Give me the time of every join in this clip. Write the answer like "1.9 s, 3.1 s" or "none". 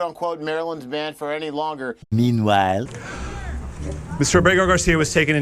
2.0 s, 3.0 s